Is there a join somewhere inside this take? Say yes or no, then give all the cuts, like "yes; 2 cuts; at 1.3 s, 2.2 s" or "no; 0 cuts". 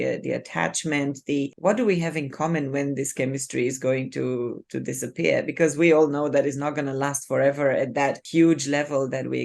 yes; 2 cuts; at 1.5 s, 8.2 s